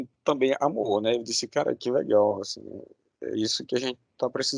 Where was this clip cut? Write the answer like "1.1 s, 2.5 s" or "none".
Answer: none